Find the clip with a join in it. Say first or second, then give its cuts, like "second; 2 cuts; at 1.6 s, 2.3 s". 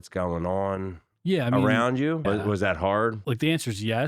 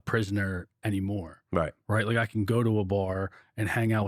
first; 2 cuts; at 2.2 s, 3.2 s